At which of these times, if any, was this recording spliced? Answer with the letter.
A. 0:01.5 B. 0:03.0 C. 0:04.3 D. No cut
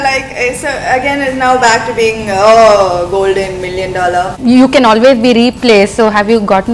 C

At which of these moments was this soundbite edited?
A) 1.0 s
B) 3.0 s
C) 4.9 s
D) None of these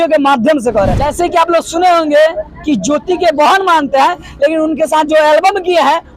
A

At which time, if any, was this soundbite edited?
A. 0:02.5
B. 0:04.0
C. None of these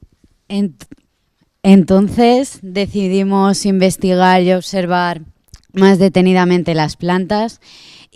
B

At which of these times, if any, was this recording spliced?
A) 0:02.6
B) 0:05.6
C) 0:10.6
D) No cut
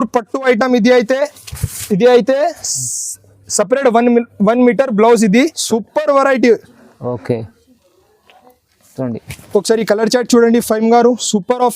B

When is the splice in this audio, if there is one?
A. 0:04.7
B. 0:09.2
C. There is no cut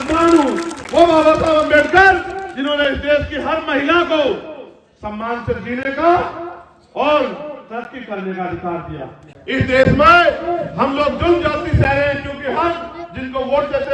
B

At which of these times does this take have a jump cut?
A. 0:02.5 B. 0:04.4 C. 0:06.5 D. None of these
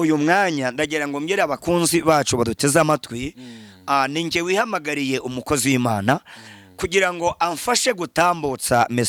D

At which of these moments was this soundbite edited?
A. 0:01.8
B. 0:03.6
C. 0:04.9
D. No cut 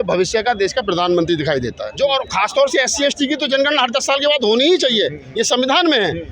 A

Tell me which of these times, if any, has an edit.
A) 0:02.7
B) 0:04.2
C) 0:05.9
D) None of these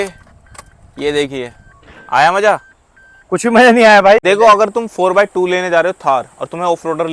B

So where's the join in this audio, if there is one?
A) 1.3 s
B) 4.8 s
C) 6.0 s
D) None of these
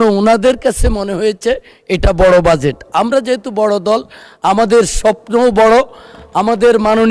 D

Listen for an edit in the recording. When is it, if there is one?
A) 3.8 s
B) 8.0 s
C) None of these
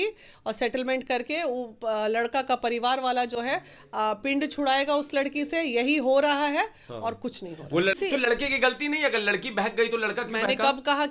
B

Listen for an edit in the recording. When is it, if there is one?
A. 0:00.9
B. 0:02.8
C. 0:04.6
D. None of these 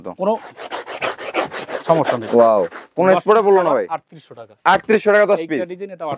D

